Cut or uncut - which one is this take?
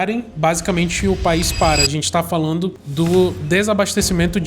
cut